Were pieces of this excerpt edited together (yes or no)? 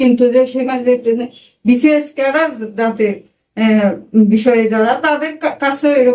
no